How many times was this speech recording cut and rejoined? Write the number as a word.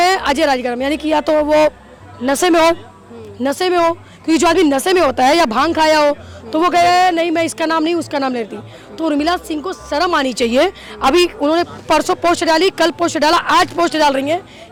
zero